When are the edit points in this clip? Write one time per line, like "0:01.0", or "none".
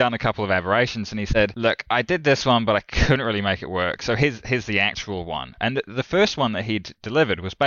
0:01.3